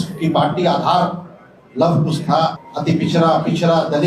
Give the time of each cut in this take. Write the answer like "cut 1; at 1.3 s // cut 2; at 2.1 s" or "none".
cut 1; at 2.7 s